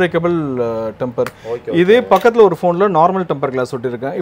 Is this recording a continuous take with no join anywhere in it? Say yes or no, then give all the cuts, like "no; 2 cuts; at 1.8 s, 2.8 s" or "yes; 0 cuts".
yes; 0 cuts